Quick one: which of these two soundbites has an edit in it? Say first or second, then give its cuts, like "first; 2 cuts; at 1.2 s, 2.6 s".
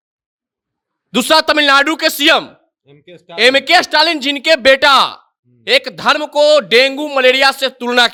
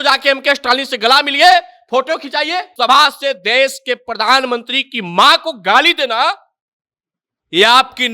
second; 1 cut; at 2.7 s